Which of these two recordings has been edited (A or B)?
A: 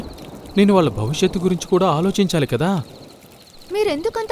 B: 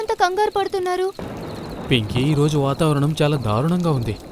B